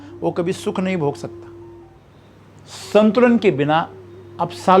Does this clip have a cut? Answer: yes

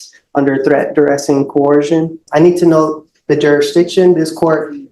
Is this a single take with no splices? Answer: no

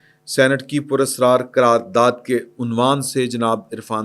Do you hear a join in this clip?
no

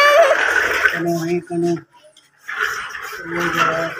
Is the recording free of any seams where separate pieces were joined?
no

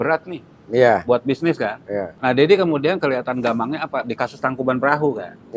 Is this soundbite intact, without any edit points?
no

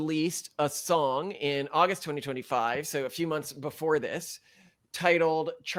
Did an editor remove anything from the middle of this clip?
no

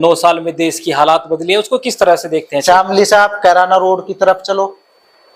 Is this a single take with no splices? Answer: no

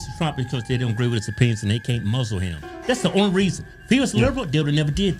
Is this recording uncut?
yes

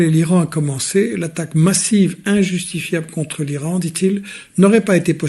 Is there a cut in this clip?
no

